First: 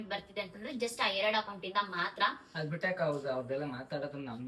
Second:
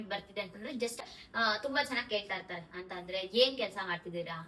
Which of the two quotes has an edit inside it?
second; 1 cut; at 1.0 s

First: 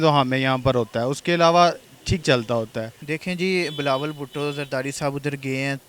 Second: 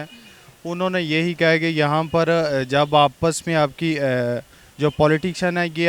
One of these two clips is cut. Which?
first; 1 cut; at 3.0 s

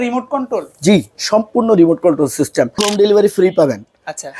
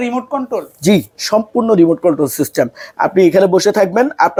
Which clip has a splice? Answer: first; 1 cut; at 2.9 s

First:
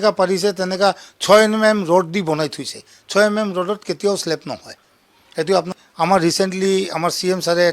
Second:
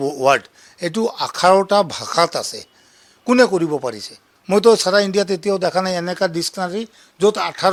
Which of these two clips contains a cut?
first; 1 cut; at 5.7 s

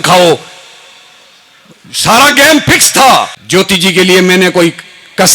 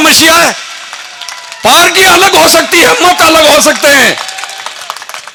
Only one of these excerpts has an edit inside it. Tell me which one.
first; 1 cut; at 3.4 s

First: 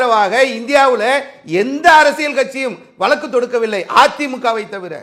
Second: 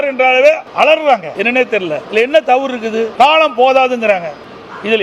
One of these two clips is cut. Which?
second; 2 cuts; at 1.7 s, 3.1 s

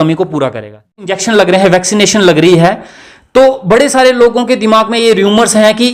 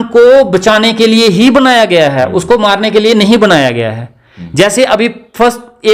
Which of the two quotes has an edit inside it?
first; 1 cut; at 1.0 s

